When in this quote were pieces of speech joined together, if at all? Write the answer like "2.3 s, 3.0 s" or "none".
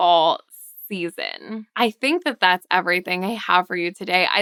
none